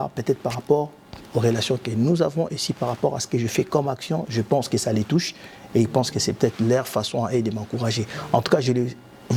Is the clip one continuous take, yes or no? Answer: yes